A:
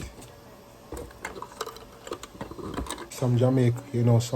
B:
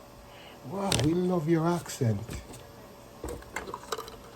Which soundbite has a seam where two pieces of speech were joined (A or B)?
A